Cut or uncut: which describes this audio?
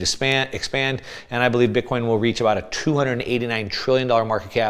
uncut